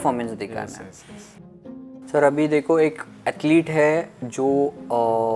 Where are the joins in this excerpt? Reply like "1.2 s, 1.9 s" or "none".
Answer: 1.6 s